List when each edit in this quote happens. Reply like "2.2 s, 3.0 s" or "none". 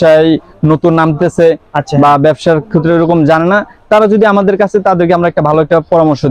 none